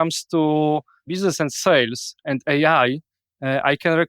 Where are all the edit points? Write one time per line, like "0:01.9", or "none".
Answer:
0:01.1